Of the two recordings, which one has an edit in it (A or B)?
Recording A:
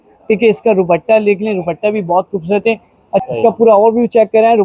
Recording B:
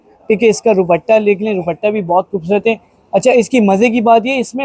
A